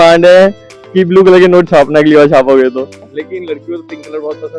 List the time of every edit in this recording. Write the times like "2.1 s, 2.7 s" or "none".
3.1 s